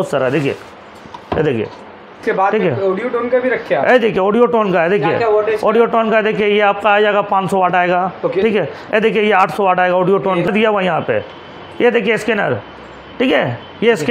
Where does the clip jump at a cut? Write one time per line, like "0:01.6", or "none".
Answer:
0:02.2
0:10.5